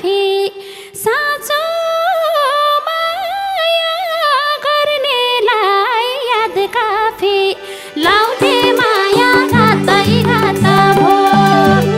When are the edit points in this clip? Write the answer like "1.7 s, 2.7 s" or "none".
none

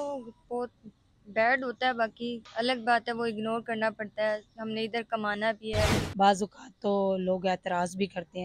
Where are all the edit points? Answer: 2.4 s, 6.0 s

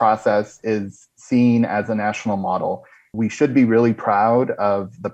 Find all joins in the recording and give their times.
3.1 s

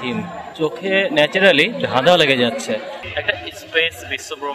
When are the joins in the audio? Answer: 3.0 s

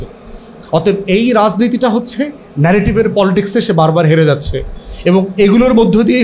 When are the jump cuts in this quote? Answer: none

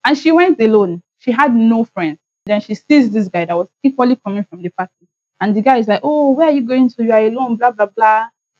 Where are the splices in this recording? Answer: 2.3 s

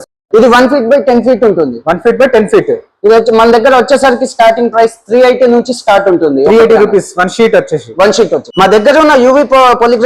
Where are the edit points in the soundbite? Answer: 8.5 s

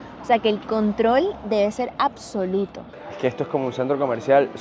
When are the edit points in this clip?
2.8 s

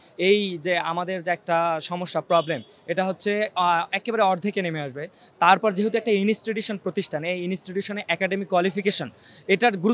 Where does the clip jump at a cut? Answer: none

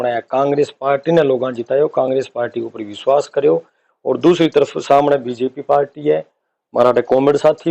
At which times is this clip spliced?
none

